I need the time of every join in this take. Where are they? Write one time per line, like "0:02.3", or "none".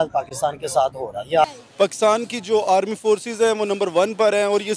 0:01.4